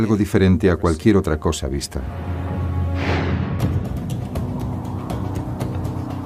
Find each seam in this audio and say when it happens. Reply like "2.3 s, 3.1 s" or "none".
2.6 s